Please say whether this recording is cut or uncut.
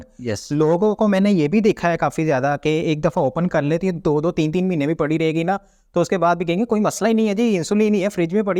uncut